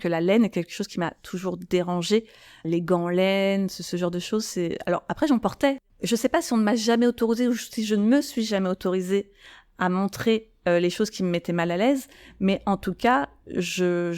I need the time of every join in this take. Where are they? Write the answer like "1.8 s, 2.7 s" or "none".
5.8 s